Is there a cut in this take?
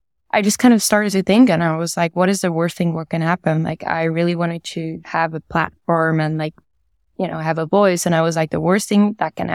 no; 0 cuts

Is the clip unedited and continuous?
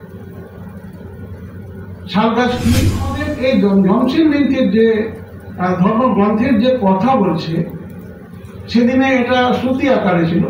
no; 1 cut; at 3.2 s

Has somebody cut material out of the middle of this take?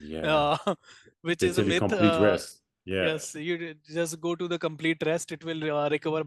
no; 0 cuts

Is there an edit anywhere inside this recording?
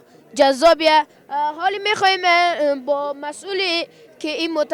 no; 0 cuts

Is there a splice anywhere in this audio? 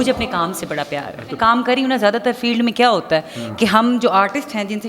yes; 1 cut; at 1.5 s

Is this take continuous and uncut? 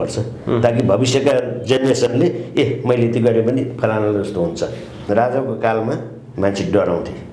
no; 1 cut; at 5.0 s

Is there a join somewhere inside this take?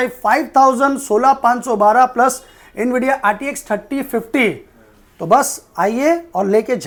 no; 0 cuts

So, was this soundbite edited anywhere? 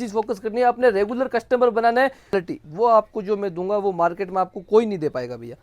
yes; 1 cut; at 2.4 s

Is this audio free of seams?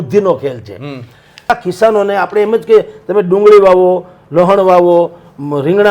no; 1 cut; at 1.5 s

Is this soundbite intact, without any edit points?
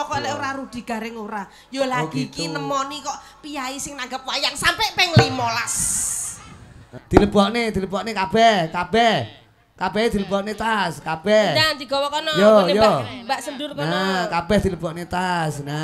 no; 1 cut; at 6.9 s

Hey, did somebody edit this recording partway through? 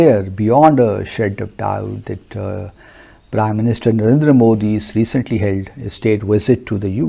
no; 0 cuts

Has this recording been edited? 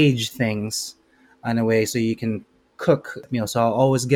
yes; 1 cut; at 3.3 s

